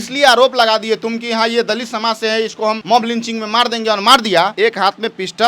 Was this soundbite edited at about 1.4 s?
no; 2 cuts; at 2.8 s, 4.5 s

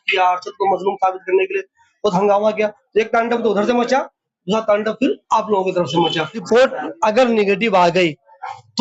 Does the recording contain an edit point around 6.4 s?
yes; 1 cut; at 6.4 s

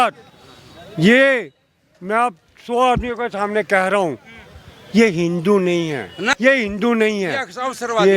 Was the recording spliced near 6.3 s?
yes; 1 cut; at 6.3 s

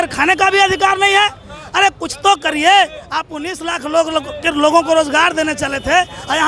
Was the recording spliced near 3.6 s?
no; 0 cuts

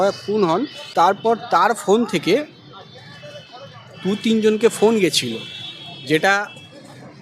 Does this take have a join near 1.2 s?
yes; 1 cut; at 1.2 s

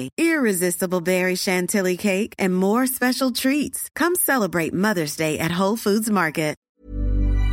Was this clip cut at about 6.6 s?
yes; 1 cut; at 6.6 s

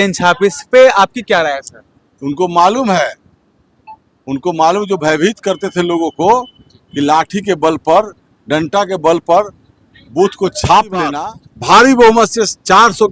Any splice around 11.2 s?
yes; 1 cut; at 11.2 s

